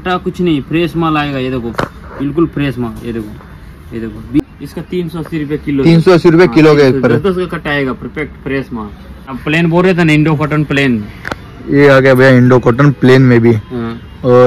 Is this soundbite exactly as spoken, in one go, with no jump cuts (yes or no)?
no